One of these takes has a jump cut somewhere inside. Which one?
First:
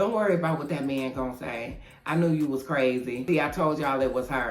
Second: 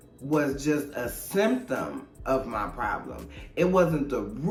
first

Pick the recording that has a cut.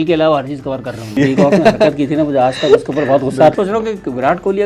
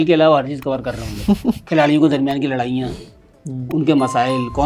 first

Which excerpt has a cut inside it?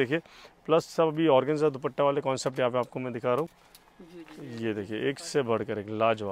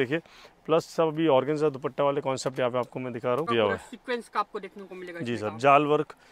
second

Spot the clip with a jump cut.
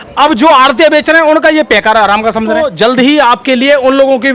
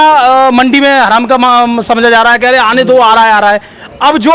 first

